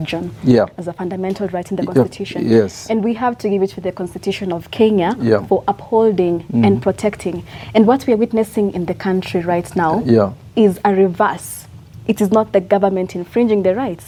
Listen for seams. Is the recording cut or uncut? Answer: uncut